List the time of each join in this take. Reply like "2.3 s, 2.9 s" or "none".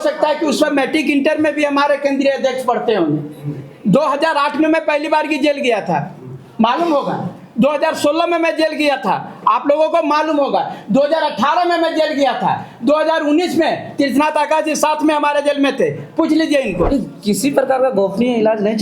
16.9 s